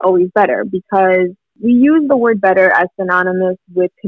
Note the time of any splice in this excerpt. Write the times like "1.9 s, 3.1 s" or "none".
1.5 s